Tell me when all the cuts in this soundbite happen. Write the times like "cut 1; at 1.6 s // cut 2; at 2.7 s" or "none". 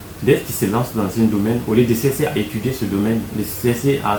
none